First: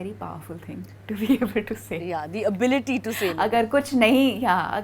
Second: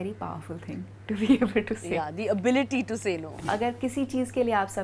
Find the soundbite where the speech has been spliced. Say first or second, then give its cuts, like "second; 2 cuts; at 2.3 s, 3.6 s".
second; 2 cuts; at 1.9 s, 3.4 s